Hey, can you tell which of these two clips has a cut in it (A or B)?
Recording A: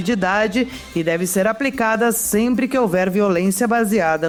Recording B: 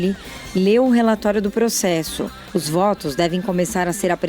B